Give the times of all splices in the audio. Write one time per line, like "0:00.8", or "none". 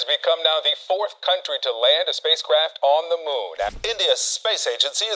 0:03.8